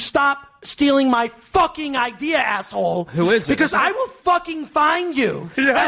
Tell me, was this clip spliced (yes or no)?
no